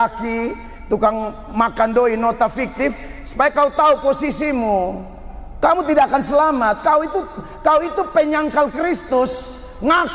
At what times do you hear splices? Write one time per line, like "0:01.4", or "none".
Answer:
none